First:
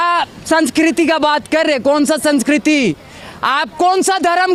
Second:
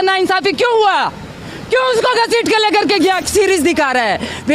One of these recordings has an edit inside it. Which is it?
second; 1 cut; at 3.2 s

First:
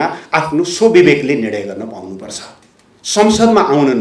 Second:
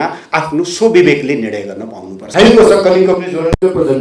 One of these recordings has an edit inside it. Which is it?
second; 1 cut; at 2.3 s

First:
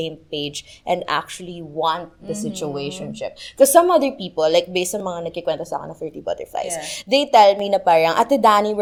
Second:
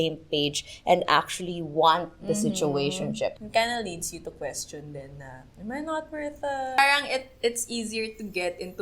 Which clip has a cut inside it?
second; 2 cuts; at 3.4 s, 6.8 s

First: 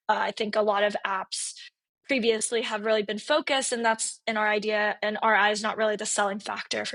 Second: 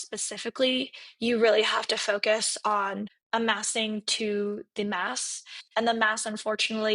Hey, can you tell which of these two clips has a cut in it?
second; 1 cut; at 3.2 s

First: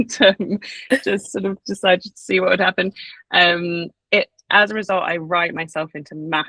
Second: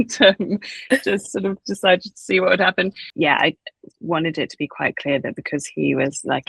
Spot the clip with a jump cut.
second; 1 cut; at 3.0 s

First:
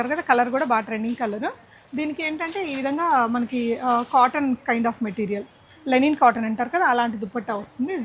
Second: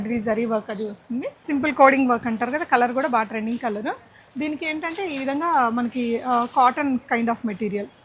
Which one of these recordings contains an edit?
second; 1 cut; at 1.4 s

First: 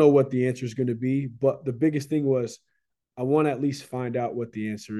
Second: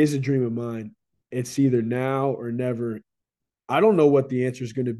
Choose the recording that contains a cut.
second; 2 cuts; at 0.9 s, 3.0 s

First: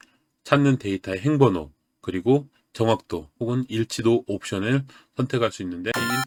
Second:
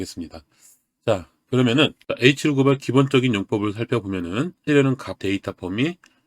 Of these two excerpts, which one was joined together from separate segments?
second; 1 cut; at 4.7 s

